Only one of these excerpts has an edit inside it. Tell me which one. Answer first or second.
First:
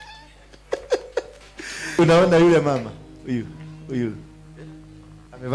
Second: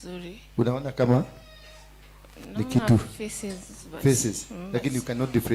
first